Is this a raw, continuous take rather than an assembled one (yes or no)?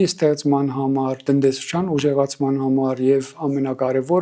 yes